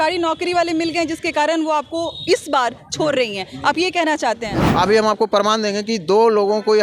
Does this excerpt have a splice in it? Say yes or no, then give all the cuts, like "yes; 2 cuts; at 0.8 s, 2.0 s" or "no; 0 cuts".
yes; 1 cut; at 4.6 s